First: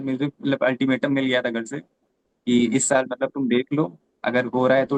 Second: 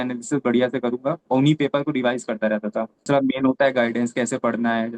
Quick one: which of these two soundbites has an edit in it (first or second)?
second